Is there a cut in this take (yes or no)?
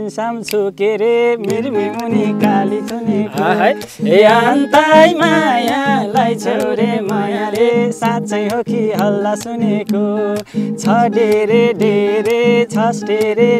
no